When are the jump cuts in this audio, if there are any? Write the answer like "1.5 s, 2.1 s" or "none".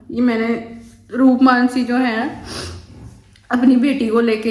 none